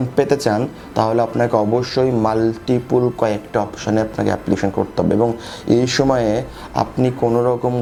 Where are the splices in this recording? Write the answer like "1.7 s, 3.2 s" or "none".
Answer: none